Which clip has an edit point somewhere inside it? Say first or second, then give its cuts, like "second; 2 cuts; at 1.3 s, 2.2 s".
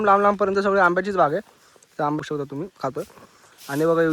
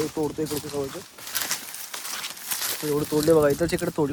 first; 1 cut; at 2.2 s